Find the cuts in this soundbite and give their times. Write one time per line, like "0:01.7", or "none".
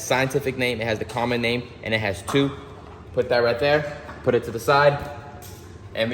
none

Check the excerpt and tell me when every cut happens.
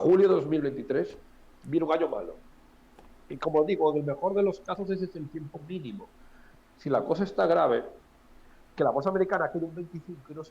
0:06.5

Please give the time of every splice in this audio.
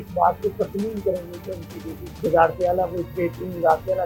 0:02.2

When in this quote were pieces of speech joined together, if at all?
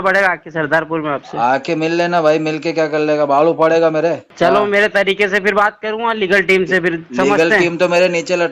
0:04.3

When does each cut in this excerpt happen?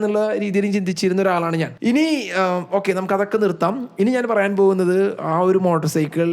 0:01.7

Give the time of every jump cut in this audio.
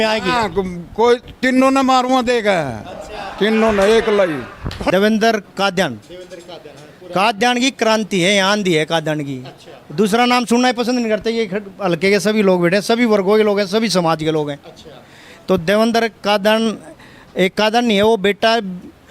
0:04.8

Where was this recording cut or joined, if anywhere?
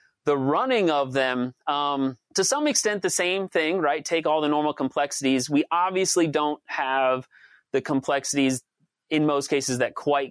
0:02.2

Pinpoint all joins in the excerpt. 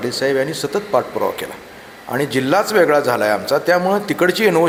none

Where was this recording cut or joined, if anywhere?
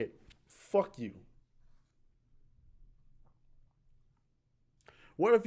none

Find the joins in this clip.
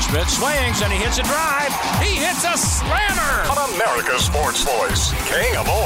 none

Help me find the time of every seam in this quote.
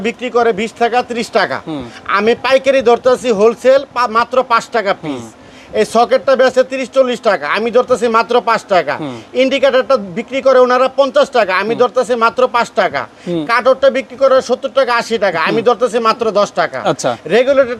none

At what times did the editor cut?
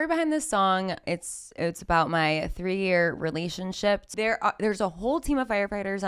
0:01.0
0:04.1

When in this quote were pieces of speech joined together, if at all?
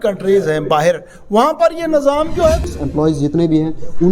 0:02.6

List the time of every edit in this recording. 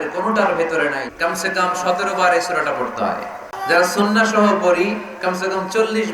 0:01.0
0:03.6

